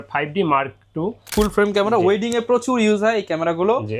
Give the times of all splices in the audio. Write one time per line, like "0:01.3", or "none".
0:01.3